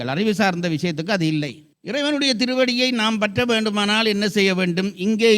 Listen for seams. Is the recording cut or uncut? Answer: cut